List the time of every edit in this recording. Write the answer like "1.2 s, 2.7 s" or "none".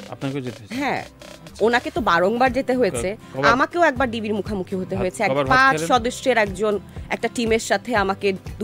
none